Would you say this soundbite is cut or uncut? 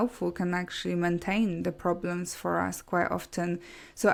uncut